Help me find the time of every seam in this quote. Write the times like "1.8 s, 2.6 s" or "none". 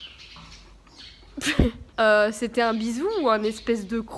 1.8 s